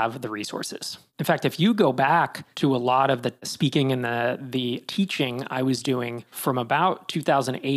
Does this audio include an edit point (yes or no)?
yes